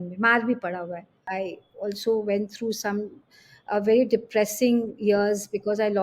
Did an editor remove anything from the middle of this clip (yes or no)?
yes